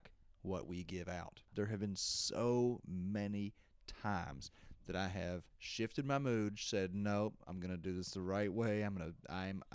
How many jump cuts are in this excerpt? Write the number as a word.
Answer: two